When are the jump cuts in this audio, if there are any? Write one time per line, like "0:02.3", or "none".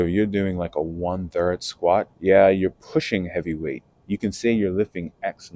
0:02.1